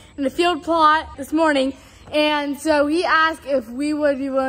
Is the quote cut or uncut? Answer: uncut